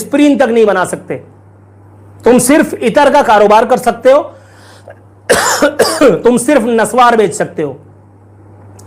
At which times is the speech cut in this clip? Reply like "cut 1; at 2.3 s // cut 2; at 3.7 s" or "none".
none

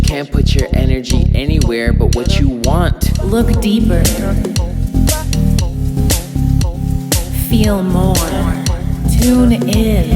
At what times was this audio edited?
cut 1; at 3.2 s // cut 2; at 9.0 s

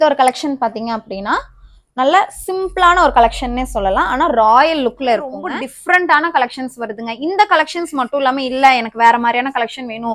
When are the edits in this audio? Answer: cut 1; at 5.5 s

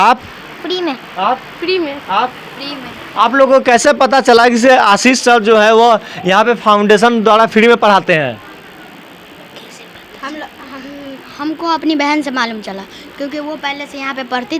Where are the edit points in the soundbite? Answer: none

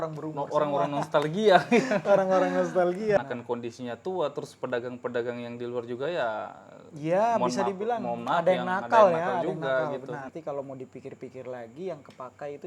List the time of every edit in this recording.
cut 1; at 3.2 s // cut 2; at 10.3 s

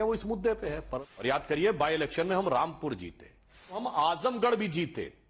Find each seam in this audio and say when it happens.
cut 1; at 1.0 s // cut 2; at 3.8 s

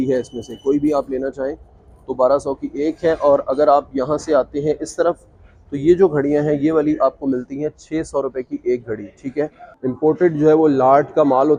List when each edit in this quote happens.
none

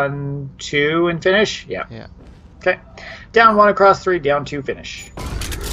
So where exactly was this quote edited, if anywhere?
cut 1; at 4.0 s

